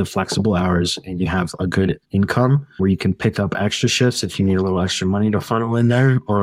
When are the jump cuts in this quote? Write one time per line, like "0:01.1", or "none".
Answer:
0:02.0
0:02.8